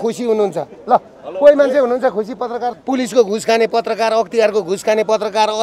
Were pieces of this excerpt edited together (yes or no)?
yes